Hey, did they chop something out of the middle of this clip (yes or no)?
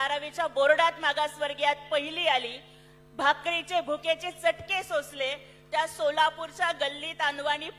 no